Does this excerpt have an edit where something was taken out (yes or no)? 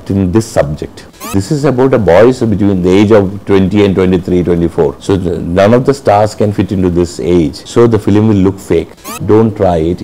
yes